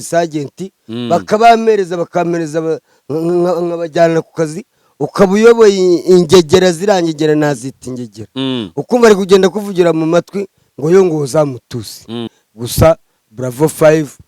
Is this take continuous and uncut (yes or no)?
no